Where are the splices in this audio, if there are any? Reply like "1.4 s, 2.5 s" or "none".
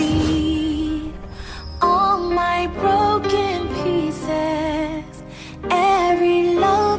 none